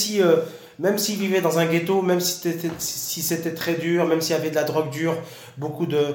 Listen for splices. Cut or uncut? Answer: uncut